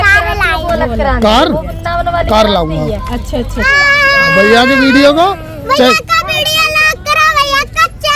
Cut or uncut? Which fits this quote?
uncut